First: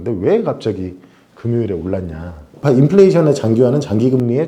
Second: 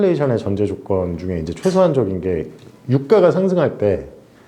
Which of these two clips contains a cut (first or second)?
first